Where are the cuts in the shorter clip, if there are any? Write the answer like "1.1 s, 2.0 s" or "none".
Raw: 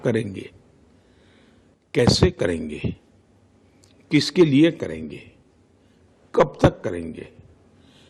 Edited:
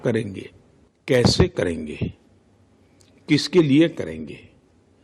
1.2 s